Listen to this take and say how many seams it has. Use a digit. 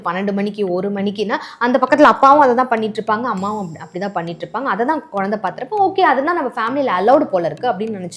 0